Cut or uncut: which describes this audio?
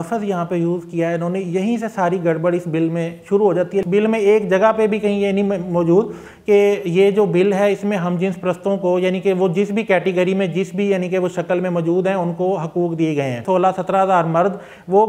cut